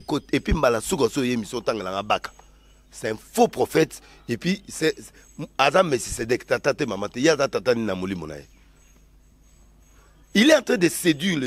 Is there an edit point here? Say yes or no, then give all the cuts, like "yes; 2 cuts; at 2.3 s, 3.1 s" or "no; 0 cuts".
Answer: no; 0 cuts